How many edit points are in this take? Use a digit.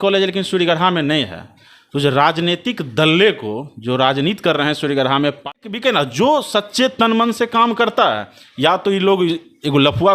1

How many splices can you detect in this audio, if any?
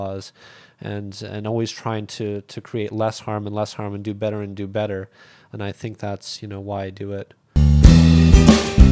1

